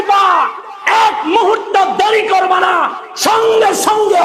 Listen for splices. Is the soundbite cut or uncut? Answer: uncut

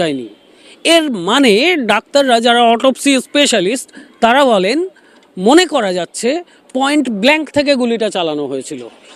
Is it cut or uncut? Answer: uncut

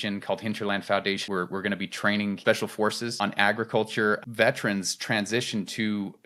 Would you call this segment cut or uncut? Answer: uncut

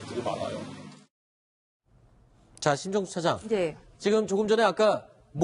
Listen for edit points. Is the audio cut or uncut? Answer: cut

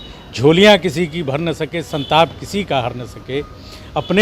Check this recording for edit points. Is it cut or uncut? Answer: uncut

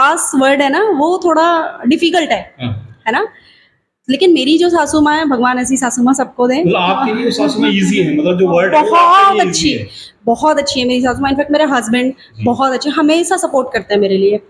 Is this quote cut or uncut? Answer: uncut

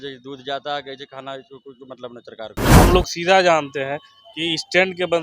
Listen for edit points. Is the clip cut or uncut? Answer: cut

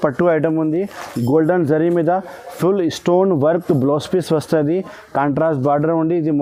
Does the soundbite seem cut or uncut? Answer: uncut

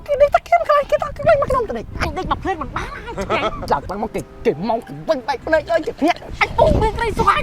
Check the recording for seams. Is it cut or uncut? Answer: cut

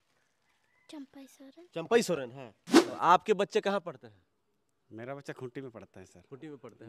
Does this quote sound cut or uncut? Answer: cut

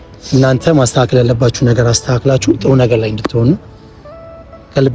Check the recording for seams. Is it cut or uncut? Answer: uncut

